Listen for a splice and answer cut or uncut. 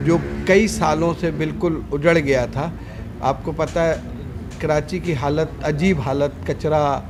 uncut